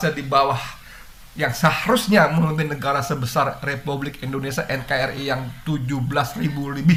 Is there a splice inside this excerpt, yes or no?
no